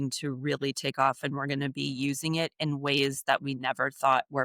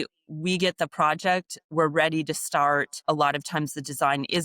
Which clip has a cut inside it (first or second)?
second